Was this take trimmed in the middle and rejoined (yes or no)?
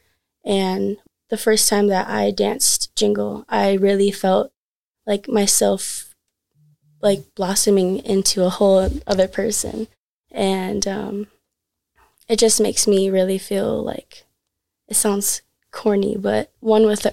yes